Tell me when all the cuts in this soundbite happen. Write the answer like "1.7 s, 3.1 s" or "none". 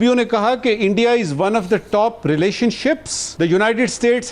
3.2 s